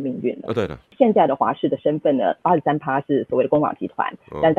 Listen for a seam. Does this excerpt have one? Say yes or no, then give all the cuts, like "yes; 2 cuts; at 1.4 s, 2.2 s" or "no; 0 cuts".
yes; 2 cuts; at 0.9 s, 2.4 s